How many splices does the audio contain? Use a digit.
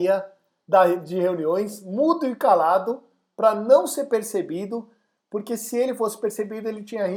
0